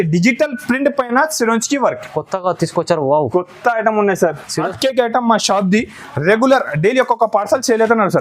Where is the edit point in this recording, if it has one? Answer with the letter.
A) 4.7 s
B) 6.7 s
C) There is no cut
A